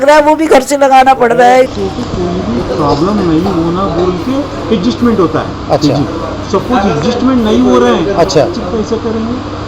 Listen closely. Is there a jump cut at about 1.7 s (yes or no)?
yes